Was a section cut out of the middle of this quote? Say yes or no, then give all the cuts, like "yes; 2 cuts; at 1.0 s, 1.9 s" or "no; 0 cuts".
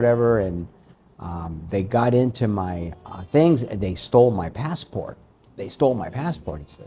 no; 0 cuts